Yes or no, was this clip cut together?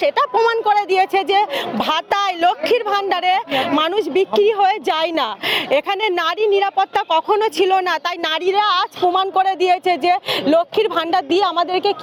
no